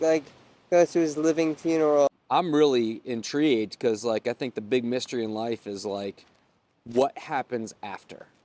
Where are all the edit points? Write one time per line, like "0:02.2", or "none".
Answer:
0:02.1

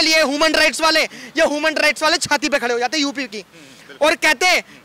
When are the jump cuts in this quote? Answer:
none

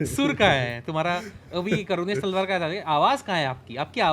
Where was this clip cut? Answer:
none

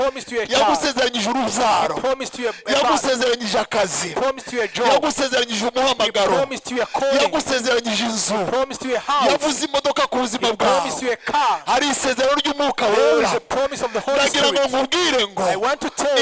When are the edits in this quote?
none

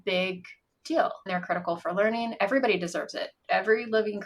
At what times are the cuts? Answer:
0:01.3

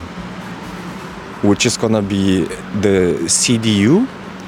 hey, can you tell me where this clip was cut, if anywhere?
none

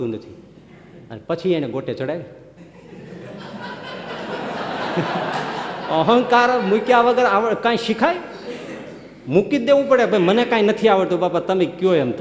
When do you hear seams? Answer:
none

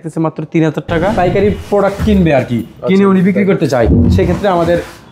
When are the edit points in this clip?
0:01.1

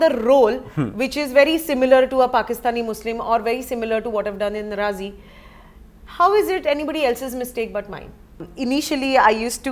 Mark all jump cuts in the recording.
0:08.5

